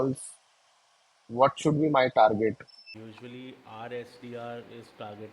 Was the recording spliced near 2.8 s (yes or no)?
yes